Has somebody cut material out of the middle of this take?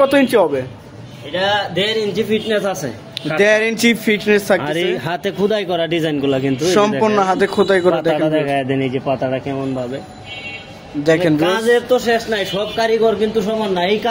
no; 0 cuts

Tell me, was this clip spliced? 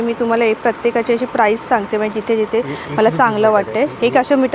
no; 0 cuts

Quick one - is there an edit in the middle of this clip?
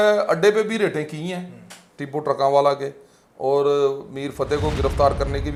no; 0 cuts

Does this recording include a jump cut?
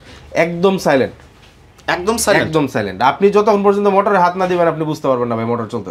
no; 0 cuts

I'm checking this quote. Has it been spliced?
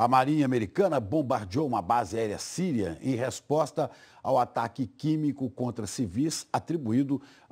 no; 0 cuts

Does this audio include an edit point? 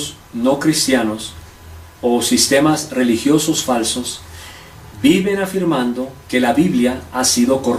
no; 0 cuts

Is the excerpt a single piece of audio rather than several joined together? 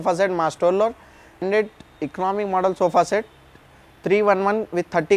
yes; 0 cuts

